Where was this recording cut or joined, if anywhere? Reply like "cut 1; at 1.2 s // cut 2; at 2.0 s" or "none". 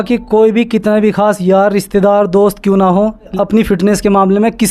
cut 1; at 3.3 s